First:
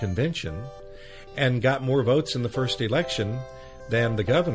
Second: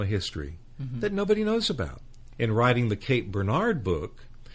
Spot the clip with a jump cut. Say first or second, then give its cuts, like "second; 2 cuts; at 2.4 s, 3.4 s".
second; 1 cut; at 2.2 s